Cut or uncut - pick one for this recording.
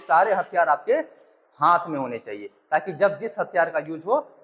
uncut